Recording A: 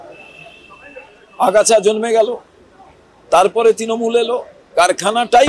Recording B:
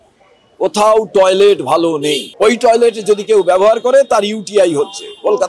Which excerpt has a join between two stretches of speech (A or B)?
B